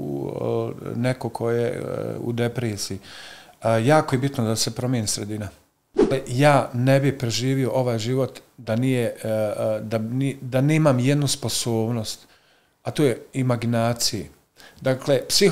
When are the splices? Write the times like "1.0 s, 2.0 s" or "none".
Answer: 6.1 s